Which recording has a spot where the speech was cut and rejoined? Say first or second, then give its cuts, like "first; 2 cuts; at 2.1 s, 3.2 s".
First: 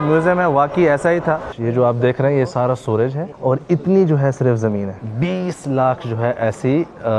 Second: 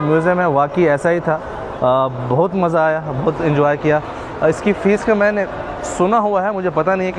first; 3 cuts; at 1.5 s, 3.3 s, 4.9 s